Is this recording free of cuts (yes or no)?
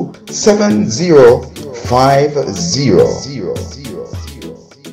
no